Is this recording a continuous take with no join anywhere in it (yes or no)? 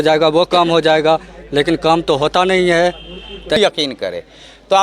no